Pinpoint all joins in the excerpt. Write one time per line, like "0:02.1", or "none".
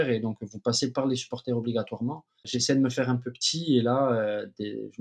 0:02.6

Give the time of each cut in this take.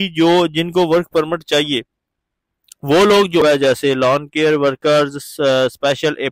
0:03.4

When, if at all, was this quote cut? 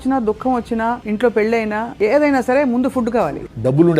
0:01.0
0:01.9
0:03.3

